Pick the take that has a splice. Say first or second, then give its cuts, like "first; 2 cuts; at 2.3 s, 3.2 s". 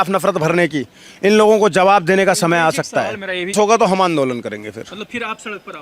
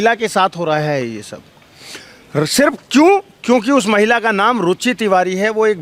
first; 1 cut; at 3.5 s